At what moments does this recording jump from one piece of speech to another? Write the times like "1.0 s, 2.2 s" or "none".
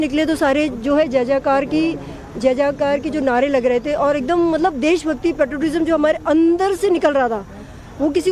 5.5 s